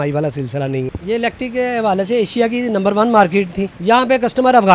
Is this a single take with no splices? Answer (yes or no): no